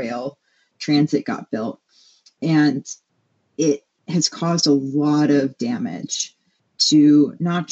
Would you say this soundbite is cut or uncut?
uncut